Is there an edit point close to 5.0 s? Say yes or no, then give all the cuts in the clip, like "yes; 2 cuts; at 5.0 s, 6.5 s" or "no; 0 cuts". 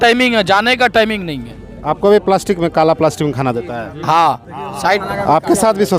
yes; 1 cut; at 5.0 s